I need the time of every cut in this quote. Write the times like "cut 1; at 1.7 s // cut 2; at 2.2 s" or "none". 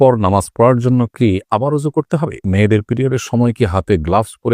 cut 1; at 2.4 s